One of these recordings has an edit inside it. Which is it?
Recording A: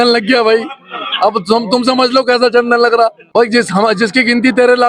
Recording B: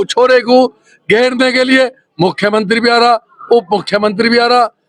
A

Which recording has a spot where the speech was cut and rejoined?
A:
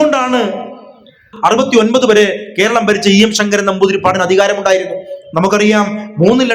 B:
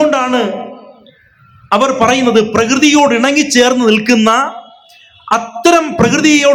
A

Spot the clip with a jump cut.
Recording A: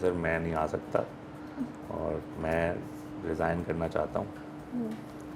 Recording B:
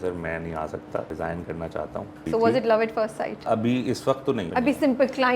B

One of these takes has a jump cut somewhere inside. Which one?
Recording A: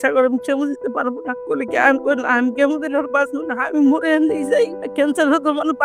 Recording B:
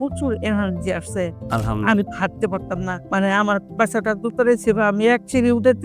B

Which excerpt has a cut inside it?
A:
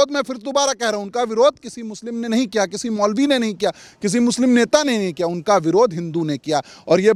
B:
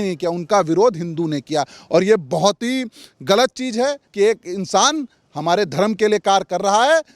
B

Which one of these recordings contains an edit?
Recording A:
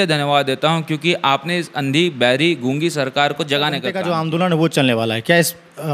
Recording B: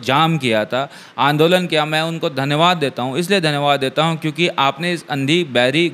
A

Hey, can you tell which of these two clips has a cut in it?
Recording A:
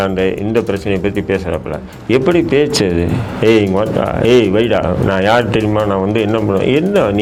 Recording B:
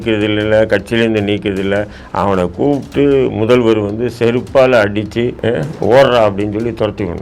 B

